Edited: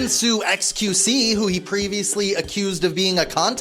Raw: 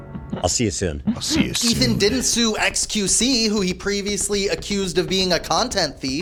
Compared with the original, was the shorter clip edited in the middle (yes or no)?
no